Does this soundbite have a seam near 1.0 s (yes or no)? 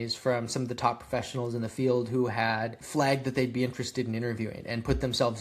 no